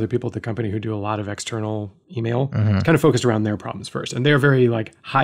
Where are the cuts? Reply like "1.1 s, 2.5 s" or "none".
2.3 s